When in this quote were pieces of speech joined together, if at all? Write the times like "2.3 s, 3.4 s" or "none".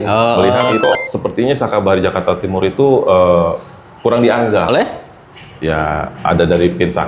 0.8 s, 4.7 s